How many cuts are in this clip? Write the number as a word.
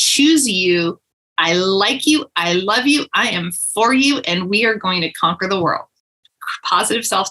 one